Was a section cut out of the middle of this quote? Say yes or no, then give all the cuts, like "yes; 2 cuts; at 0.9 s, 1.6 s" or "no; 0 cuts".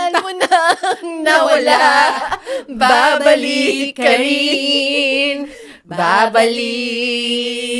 no; 0 cuts